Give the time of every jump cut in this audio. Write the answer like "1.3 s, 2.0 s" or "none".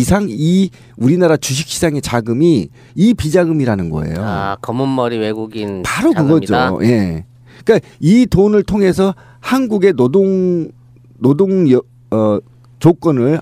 none